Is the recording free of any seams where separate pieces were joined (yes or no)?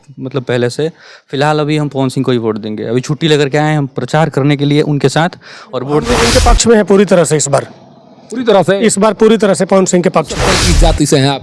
no